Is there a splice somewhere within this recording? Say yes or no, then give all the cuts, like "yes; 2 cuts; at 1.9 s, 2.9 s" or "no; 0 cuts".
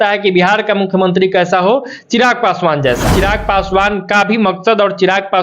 yes; 1 cut; at 3.1 s